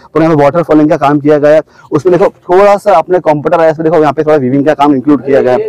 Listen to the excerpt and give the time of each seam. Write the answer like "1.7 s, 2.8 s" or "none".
none